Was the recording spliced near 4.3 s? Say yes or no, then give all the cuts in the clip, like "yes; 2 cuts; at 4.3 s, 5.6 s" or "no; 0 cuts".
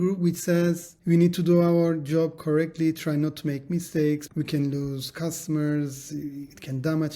yes; 2 cuts; at 0.9 s, 4.3 s